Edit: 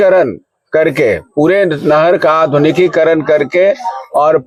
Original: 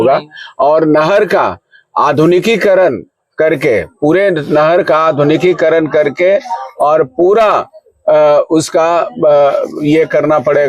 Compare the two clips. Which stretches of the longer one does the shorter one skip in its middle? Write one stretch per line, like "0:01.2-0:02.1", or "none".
none